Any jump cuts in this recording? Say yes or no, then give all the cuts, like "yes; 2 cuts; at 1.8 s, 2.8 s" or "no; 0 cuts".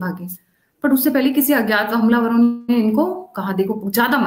no; 0 cuts